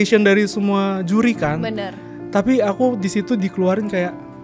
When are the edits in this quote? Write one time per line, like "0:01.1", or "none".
none